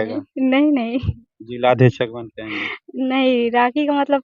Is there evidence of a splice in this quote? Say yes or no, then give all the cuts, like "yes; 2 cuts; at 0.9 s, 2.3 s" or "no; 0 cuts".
no; 0 cuts